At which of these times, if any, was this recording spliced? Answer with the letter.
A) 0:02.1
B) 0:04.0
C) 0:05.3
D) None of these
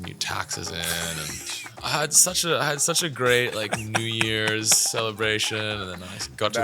A